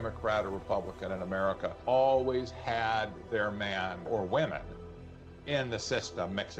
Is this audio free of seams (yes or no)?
no